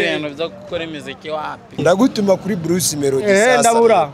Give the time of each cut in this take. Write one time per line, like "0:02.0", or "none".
0:01.8